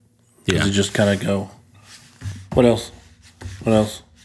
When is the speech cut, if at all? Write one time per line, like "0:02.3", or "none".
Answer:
none